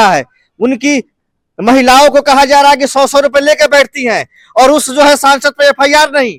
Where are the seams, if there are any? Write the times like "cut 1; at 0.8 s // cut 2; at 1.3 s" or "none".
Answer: none